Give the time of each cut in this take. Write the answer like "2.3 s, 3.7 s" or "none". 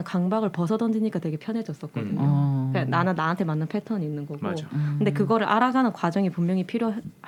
none